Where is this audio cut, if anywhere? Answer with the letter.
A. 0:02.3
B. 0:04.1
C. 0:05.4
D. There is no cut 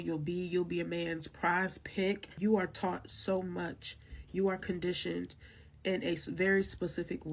A